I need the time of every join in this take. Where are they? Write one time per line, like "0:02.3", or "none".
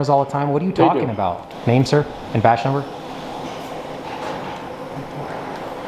0:01.4

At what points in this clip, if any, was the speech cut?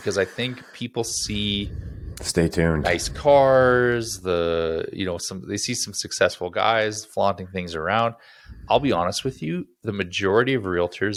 none

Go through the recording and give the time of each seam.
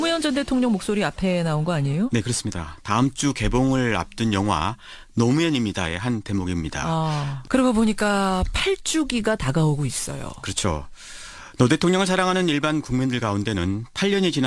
0:09.9

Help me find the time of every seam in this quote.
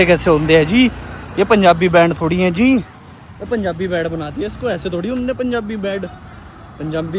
none

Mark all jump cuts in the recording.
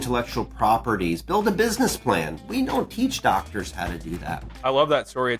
0:04.5

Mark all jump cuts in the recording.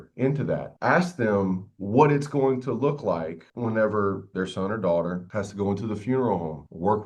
0:04.3

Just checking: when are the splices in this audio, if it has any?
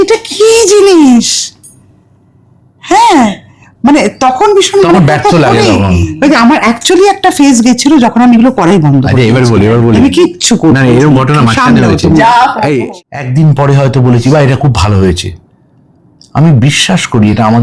0:12.9

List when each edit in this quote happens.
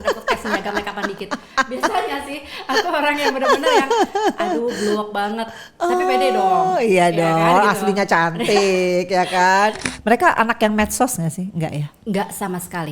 0:09.9

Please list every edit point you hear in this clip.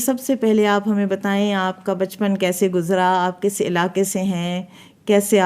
none

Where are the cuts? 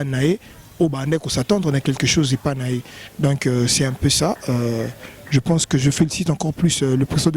none

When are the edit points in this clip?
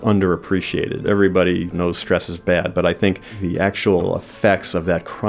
0:01.0
0:01.7
0:03.3
0:04.0

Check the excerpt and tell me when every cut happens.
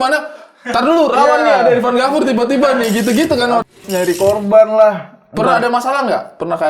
0:03.7

